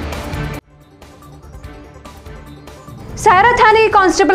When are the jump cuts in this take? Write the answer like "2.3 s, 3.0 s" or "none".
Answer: 2.4 s